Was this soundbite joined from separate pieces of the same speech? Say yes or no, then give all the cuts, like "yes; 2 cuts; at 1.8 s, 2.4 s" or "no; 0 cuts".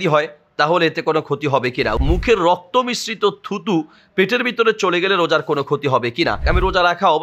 yes; 2 cuts; at 2.0 s, 6.4 s